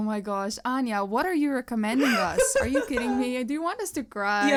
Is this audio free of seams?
yes; 0 cuts

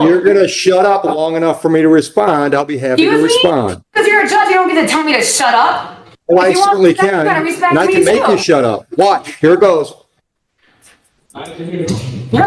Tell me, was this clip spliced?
no; 0 cuts

